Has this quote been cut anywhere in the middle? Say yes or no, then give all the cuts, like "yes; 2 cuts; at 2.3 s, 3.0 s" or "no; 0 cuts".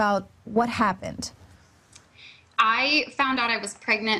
yes; 1 cut; at 3.1 s